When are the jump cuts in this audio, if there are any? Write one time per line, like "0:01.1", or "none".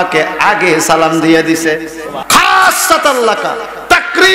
0:02.1

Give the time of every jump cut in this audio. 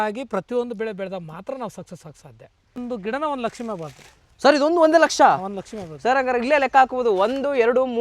0:02.8

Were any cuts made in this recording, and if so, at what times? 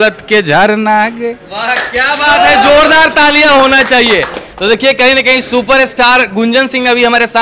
none

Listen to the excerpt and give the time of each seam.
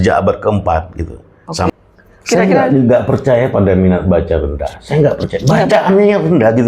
0:01.7

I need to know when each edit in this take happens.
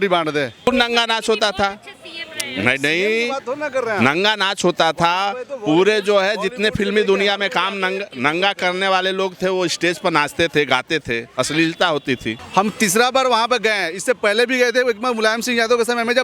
0:00.7
0:12.4

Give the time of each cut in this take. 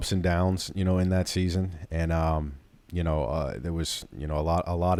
none

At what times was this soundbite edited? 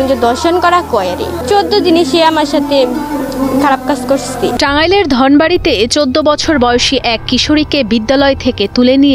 0:04.5

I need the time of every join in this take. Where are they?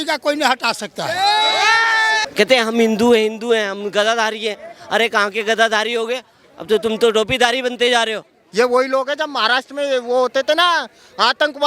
0:02.2
0:08.3

